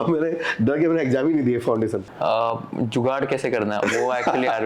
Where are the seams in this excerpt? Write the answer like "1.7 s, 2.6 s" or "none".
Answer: 2.1 s